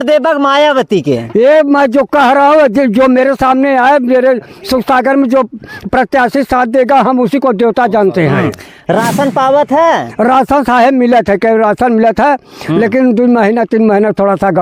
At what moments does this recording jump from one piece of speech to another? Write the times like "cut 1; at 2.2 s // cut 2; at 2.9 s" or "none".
none